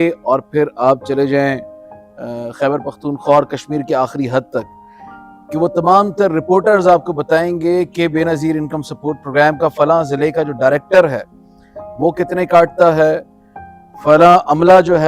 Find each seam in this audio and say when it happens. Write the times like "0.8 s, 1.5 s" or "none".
none